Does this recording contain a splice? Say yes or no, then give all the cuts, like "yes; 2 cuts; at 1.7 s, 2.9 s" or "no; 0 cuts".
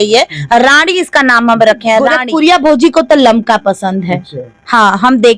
yes; 1 cut; at 2.2 s